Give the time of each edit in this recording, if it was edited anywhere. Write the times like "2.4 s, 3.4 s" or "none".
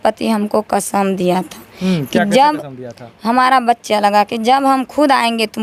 none